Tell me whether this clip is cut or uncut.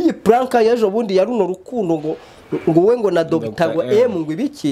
uncut